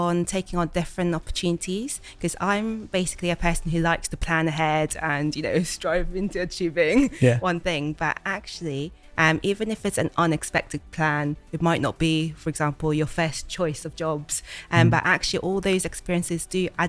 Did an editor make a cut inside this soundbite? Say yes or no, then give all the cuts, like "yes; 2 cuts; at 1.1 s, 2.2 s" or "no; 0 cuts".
no; 0 cuts